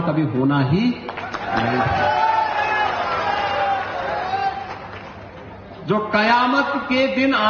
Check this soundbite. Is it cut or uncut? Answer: uncut